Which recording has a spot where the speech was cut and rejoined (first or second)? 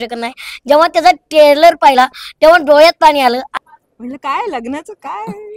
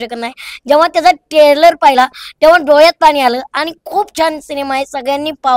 first